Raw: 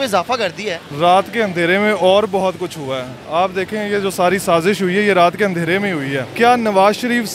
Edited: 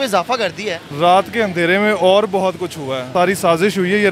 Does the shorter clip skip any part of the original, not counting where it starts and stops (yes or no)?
yes